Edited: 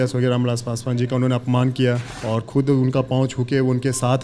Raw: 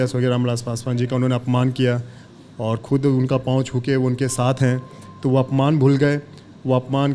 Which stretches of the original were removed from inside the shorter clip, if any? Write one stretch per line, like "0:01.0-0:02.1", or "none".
0:02.1-0:02.5